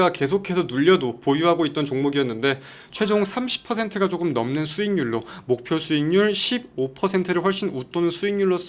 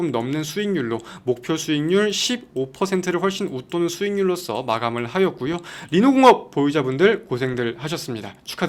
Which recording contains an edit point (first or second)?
first